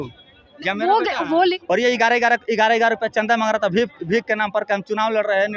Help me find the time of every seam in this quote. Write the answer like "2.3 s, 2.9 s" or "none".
1.6 s